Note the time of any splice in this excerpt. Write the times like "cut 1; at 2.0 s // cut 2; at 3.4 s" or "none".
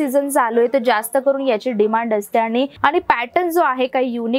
cut 1; at 2.7 s